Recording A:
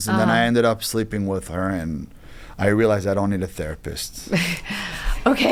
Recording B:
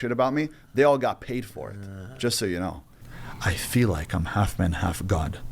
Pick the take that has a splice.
B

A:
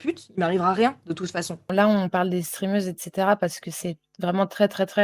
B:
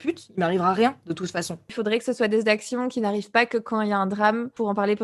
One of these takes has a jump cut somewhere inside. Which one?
A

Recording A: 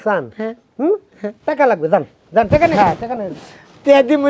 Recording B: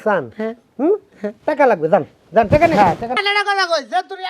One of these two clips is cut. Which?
B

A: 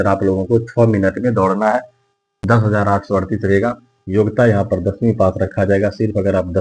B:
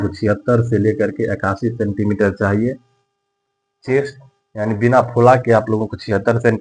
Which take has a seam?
A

